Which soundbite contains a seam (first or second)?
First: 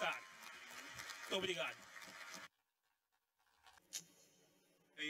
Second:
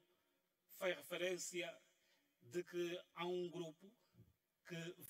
first